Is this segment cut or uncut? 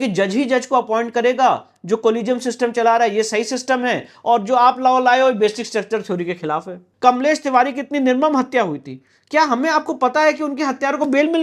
cut